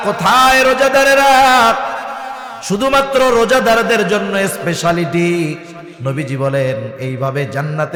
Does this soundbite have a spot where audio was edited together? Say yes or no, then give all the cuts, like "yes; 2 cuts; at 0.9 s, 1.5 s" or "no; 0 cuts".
no; 0 cuts